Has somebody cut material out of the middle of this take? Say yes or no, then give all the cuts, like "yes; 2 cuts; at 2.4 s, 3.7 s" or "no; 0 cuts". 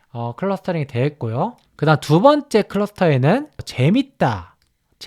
yes; 2 cuts; at 1.6 s, 3.7 s